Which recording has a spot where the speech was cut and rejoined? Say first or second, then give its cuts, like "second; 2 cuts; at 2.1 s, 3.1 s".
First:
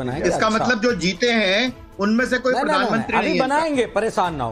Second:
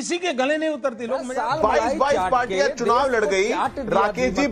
second; 1 cut; at 1.3 s